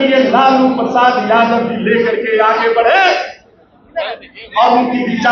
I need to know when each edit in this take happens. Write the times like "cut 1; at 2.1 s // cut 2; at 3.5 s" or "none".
none